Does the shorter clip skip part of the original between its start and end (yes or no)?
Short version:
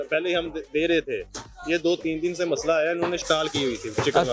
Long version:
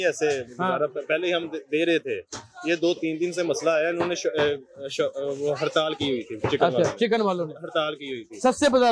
yes